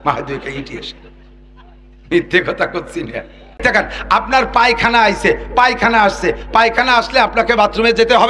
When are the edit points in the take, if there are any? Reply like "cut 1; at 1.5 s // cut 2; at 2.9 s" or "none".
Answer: cut 1; at 3.6 s